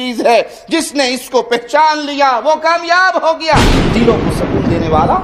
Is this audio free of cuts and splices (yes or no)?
no